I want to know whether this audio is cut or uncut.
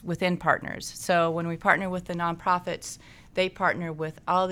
uncut